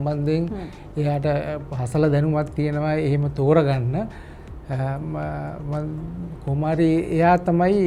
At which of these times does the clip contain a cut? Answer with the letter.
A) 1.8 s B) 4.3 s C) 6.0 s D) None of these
D